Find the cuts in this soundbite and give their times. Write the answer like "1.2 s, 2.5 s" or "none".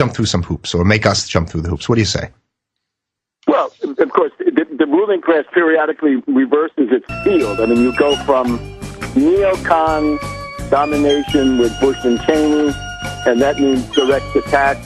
none